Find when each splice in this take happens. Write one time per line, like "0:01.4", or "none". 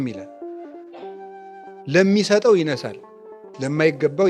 none